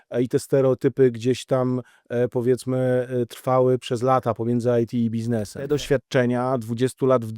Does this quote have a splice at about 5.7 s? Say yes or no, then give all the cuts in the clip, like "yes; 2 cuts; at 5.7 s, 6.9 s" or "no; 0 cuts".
yes; 1 cut; at 5.7 s